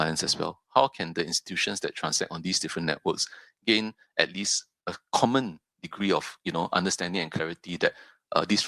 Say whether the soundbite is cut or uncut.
uncut